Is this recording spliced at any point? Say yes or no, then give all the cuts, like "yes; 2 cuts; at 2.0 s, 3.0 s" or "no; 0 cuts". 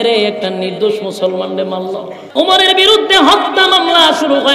yes; 1 cut; at 2.2 s